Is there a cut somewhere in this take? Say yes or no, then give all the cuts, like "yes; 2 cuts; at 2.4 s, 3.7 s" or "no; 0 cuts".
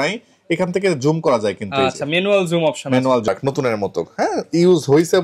yes; 1 cut; at 3.3 s